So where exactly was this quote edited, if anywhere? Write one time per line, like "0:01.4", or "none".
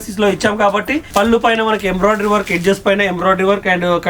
0:01.0